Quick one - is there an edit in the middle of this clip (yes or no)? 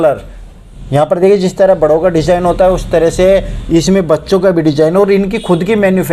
no